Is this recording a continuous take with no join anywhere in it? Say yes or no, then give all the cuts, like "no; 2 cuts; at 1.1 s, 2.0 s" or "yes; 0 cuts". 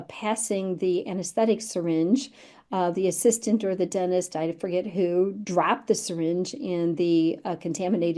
yes; 0 cuts